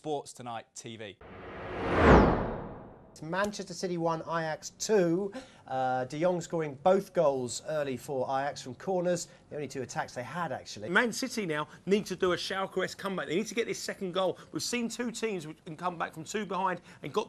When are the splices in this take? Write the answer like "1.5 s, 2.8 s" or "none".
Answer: 4.6 s